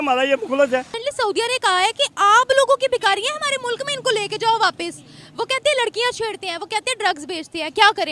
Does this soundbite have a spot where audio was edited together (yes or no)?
yes